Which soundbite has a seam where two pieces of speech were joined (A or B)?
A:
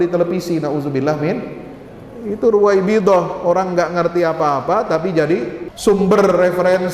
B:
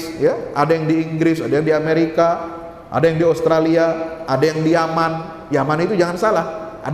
A